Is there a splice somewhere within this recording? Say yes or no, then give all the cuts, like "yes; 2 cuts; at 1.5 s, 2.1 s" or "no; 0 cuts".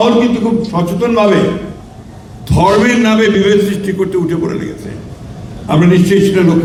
no; 0 cuts